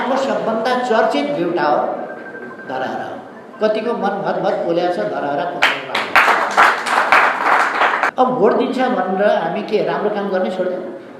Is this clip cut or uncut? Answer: cut